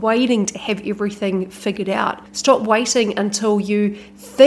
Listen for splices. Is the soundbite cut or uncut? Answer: cut